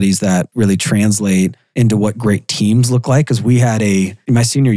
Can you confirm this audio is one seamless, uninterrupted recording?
no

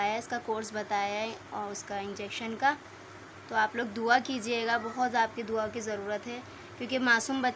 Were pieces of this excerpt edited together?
no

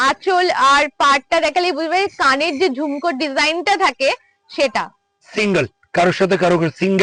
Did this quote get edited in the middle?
no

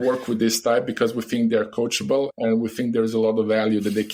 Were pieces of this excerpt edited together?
no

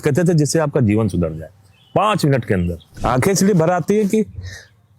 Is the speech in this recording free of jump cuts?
no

